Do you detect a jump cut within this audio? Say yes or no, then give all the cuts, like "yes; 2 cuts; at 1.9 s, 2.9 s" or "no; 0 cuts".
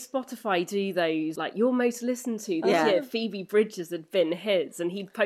yes; 1 cut; at 1.4 s